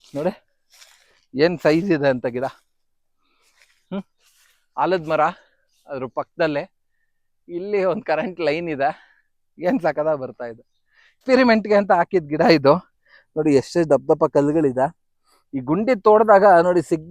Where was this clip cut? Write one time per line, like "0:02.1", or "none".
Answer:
0:11.2